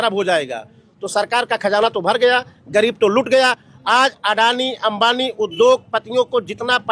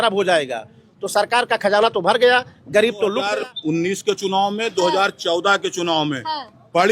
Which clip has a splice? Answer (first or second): second